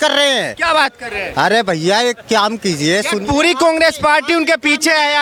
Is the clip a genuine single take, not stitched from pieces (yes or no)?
yes